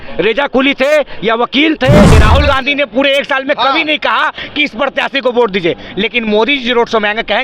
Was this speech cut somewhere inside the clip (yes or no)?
yes